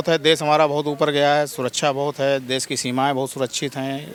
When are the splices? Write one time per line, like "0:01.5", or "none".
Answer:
none